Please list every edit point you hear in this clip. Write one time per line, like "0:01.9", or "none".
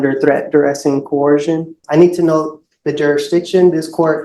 0:01.8